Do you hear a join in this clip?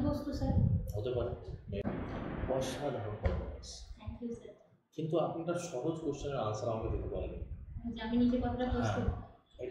yes; 1 cut; at 1.8 s

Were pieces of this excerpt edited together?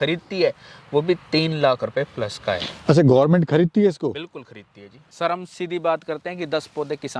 yes; 1 cut; at 5.1 s

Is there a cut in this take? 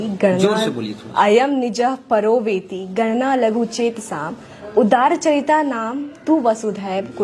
no; 0 cuts

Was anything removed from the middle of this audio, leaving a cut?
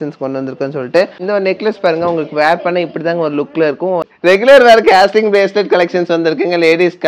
yes; 1 cut; at 4.1 s

